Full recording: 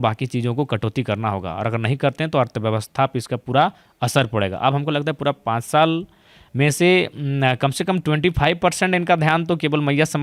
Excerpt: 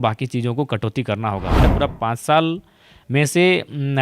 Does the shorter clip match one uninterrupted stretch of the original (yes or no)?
no